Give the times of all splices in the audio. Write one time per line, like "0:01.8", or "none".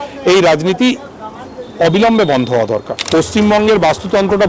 0:02.9